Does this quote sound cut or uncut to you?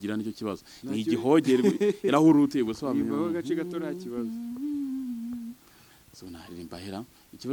uncut